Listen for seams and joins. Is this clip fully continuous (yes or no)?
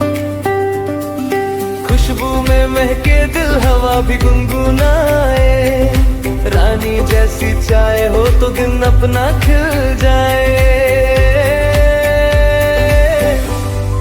yes